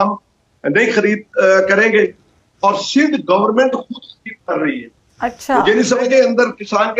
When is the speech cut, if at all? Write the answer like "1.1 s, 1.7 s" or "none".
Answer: 6.1 s